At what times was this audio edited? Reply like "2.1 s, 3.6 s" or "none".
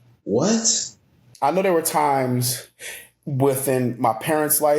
1.2 s